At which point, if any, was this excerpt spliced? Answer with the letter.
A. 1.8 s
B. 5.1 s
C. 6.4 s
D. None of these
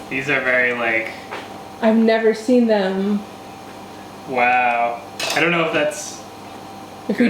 B